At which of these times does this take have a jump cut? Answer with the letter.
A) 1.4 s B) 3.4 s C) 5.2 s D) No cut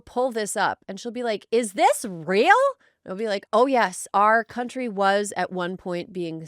B